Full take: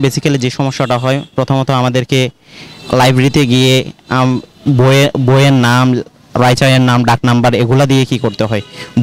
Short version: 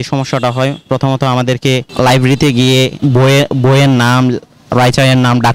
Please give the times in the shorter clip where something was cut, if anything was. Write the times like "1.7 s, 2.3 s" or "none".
1.9 s, 2.9 s